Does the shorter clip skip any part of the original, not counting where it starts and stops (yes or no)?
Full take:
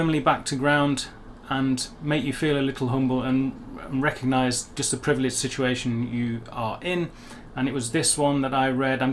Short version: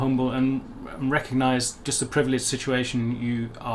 no